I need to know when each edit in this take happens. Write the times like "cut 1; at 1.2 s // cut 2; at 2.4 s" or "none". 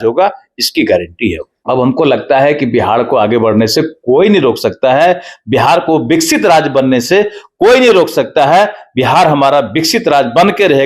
cut 1; at 1.5 s